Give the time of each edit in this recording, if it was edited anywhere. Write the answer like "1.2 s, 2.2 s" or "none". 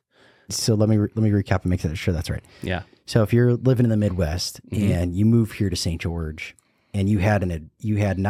none